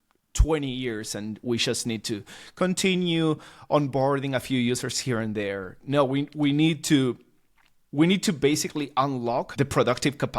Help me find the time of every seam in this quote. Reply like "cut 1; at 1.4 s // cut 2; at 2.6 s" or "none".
cut 1; at 9.5 s